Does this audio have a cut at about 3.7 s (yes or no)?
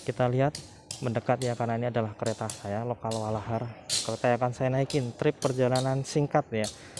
no